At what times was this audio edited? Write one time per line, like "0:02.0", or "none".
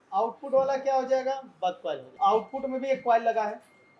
0:02.1